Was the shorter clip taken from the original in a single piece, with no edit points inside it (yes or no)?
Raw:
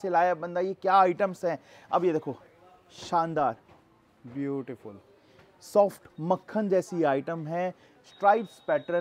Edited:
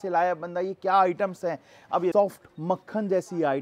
no